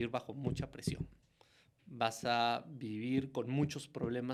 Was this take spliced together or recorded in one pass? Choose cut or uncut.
uncut